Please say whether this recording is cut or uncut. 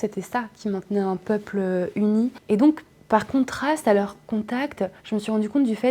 cut